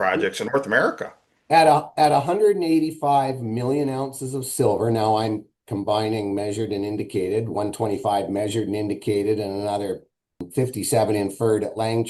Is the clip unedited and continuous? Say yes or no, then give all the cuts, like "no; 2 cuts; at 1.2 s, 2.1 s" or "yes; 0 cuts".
no; 1 cut; at 10.5 s